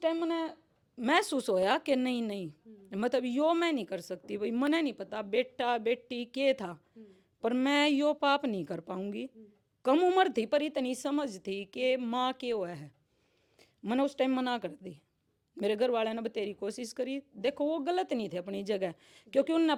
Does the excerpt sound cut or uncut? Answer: uncut